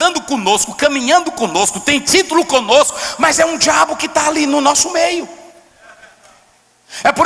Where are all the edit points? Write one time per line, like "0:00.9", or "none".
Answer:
none